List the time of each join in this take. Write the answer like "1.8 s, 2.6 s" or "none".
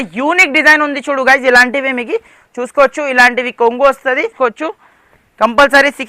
4.3 s